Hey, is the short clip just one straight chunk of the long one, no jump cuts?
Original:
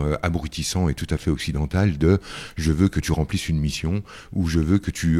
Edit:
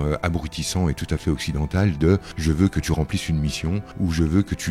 no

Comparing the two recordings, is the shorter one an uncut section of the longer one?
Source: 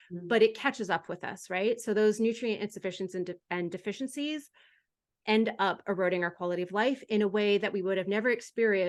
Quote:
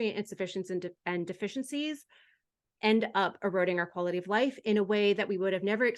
yes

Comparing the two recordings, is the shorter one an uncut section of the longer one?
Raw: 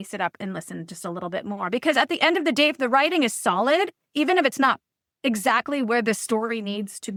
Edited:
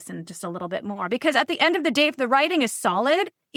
yes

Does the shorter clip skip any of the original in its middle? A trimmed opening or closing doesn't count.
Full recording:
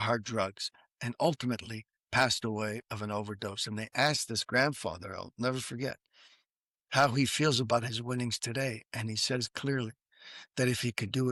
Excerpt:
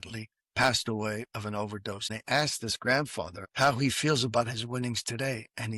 yes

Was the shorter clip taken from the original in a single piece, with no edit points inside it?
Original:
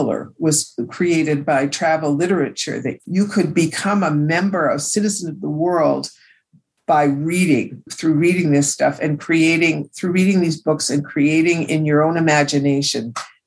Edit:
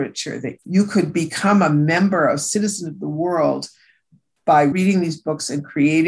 no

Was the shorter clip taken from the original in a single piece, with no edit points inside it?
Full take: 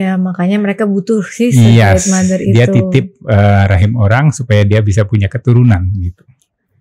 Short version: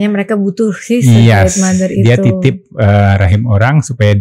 yes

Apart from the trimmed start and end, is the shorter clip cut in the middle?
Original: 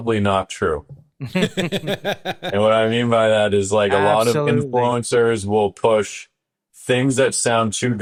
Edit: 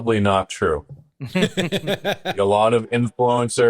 yes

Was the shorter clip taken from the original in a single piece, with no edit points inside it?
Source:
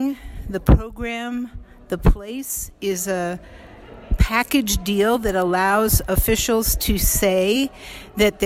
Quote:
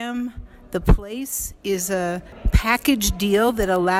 no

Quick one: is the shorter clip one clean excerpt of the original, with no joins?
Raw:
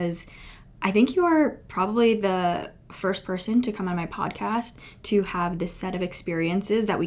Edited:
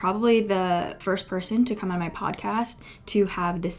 no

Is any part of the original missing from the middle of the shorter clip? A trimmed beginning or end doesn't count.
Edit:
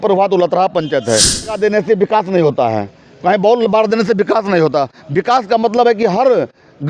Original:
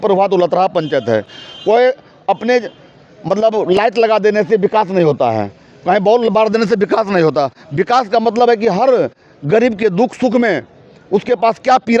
yes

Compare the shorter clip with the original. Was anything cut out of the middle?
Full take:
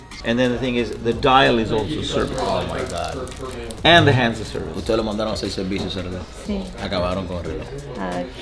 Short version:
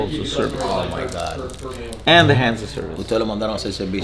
no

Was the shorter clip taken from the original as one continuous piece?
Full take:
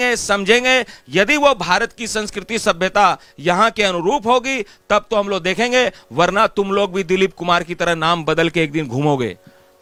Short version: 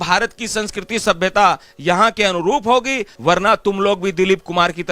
no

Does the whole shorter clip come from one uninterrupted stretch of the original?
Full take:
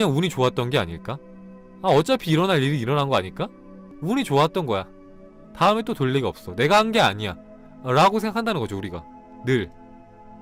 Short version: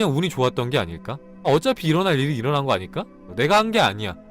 no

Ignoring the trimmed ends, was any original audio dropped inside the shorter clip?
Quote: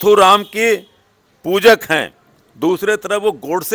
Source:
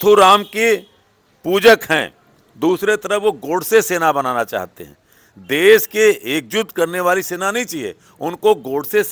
no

